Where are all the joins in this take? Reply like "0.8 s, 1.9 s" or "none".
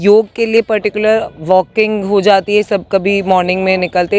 none